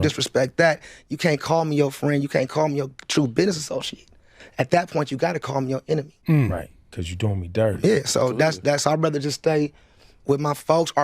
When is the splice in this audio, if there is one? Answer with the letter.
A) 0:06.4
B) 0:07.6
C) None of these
A